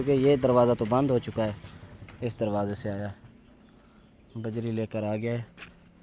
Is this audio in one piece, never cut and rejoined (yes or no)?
yes